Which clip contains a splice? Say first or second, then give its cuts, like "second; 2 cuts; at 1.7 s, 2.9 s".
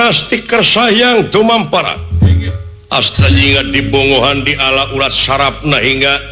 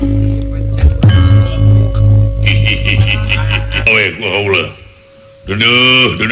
second; 1 cut; at 3.9 s